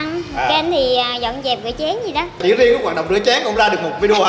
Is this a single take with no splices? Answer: no; 1 cut; at 2.4 s

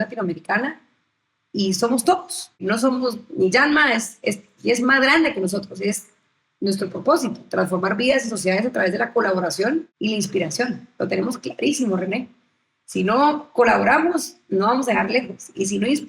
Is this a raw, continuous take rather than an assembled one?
no; 2 cuts; at 2.6 s, 9.9 s

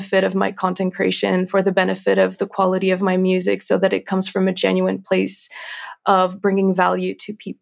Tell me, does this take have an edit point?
no; 0 cuts

